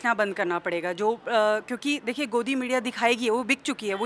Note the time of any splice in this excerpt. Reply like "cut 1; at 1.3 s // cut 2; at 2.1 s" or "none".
none